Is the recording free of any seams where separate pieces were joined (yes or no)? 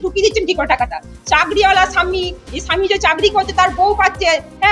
yes